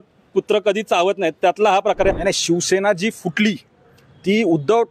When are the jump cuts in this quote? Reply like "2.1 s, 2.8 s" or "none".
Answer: 2.1 s